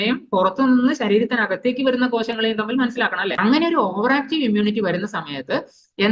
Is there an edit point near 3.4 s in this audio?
yes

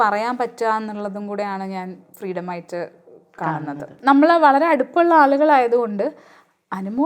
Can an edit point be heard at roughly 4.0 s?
yes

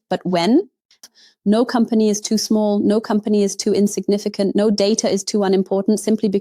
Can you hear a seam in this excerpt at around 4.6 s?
no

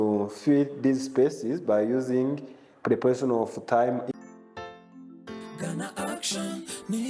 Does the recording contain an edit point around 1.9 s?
no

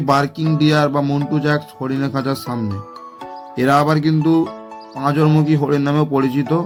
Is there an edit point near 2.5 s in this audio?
no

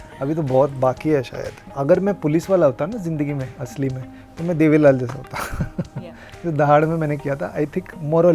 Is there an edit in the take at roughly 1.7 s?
yes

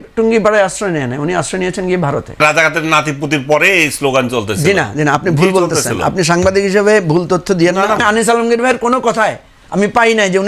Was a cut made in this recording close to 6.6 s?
no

